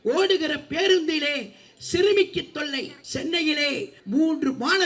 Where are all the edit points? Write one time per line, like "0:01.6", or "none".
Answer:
0:03.0
0:04.0